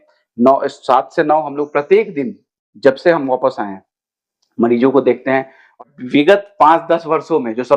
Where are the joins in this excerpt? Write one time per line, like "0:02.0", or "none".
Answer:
0:05.8